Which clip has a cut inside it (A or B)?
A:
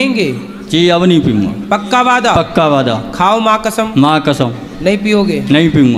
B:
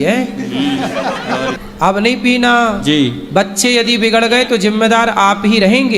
B